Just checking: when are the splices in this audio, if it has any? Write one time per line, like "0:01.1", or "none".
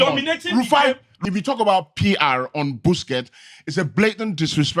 0:01.1